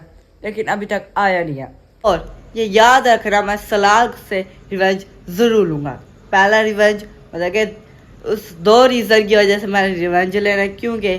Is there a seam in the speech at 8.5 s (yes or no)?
no